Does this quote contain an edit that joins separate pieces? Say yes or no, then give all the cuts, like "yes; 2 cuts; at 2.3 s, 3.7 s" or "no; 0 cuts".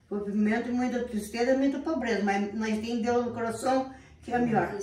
no; 0 cuts